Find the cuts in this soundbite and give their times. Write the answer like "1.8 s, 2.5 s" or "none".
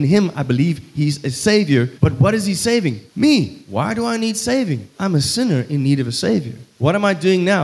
1.9 s, 3.0 s, 3.6 s, 4.9 s, 6.6 s